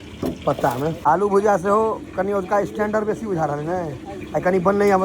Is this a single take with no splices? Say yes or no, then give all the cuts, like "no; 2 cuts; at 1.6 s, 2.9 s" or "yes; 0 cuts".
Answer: no; 1 cut; at 1.0 s